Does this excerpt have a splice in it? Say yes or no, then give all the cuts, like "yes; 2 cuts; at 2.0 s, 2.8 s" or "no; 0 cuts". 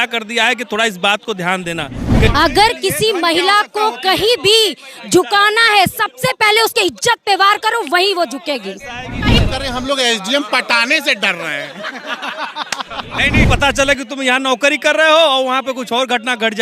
yes; 3 cuts; at 2.3 s, 9.4 s, 13.5 s